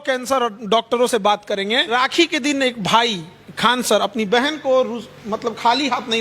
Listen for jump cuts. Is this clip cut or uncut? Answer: cut